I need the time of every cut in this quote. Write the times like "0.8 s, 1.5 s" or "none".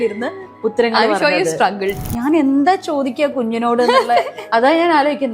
1.9 s